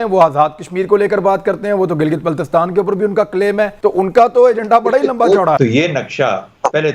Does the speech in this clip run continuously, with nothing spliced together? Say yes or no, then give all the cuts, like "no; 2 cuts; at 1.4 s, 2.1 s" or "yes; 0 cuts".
no; 2 cuts; at 3.7 s, 5.6 s